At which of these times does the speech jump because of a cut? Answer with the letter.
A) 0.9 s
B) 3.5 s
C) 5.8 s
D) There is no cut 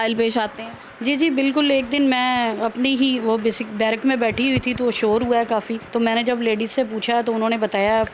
C